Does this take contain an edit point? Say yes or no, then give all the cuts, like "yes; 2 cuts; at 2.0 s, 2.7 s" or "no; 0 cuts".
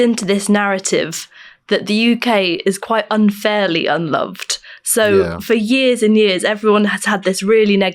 no; 0 cuts